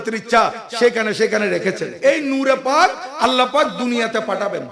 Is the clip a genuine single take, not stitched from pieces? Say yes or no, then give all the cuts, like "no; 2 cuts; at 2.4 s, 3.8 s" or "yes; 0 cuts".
no; 1 cut; at 1.9 s